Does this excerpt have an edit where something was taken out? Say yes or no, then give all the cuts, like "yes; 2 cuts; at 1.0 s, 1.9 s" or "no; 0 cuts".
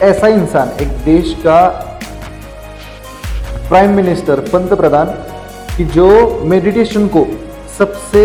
no; 0 cuts